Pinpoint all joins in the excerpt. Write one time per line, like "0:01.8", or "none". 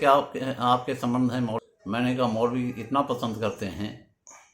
0:01.6